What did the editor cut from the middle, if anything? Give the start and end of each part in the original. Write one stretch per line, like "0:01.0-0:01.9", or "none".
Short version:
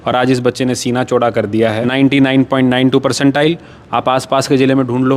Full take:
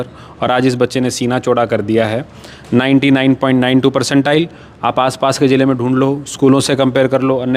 0:02.2-0:02.7